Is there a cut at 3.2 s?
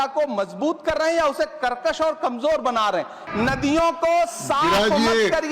yes; 1 cut; at 3.2 s

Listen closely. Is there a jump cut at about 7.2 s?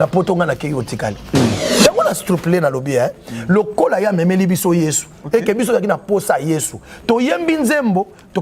no; 1 cut; at 1.7 s

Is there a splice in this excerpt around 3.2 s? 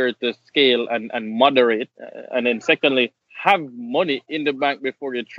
yes; 1 cut; at 3.2 s

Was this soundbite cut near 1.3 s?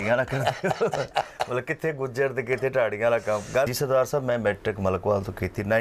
no; 1 cut; at 3.7 s

